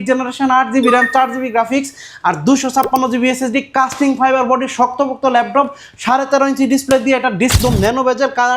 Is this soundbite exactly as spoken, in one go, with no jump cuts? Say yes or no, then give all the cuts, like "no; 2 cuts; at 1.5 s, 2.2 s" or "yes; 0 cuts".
no; 1 cut; at 7.6 s